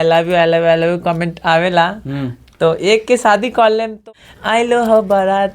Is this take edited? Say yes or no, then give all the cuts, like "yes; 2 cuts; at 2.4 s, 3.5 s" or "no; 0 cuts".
yes; 1 cut; at 4.0 s